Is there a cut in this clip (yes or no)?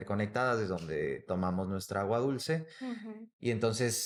no